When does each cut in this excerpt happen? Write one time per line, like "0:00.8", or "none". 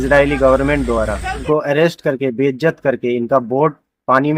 0:01.4